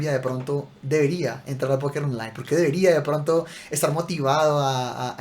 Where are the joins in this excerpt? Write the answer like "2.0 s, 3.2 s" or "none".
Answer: none